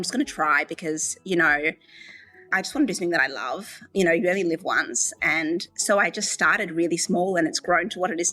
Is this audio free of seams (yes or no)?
no